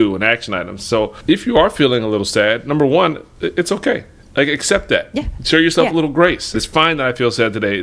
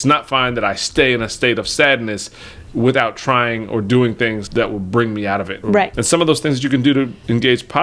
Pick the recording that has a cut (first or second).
first